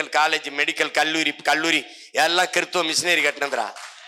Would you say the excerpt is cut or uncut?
uncut